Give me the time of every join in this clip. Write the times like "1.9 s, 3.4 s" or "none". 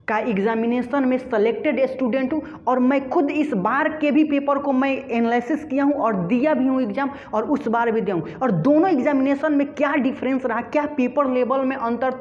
none